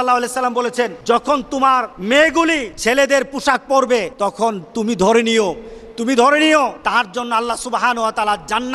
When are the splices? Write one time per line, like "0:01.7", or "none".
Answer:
0:01.0
0:01.9
0:02.7
0:04.1
0:06.8